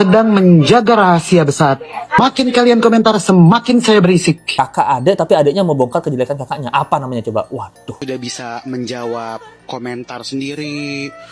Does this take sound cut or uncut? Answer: cut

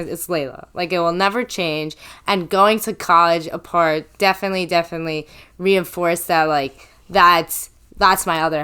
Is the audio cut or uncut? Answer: uncut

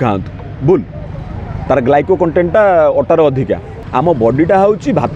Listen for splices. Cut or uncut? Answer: cut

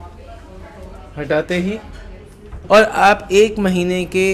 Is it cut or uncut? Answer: cut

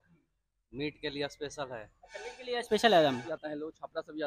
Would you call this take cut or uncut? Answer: cut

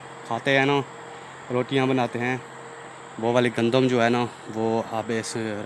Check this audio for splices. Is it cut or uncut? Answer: uncut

